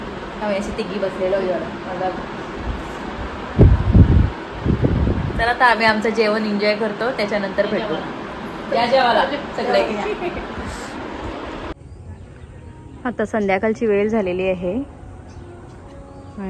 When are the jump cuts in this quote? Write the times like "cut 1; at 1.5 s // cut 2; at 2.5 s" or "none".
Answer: none